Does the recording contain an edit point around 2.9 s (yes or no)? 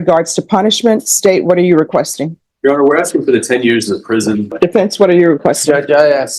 no